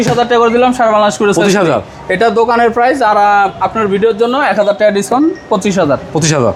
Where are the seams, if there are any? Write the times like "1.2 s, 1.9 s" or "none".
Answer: none